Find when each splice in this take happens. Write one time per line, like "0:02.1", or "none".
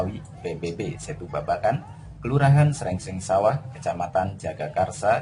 0:02.7